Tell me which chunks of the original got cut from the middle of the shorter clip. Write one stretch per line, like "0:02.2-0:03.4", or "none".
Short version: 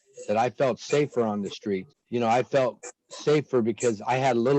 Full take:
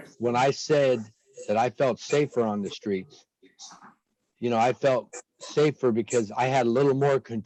0:03.2-0:04.3